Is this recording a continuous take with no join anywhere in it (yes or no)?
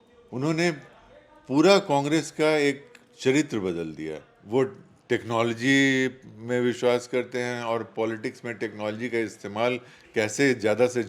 no